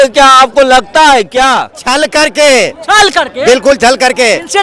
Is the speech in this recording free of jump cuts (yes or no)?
no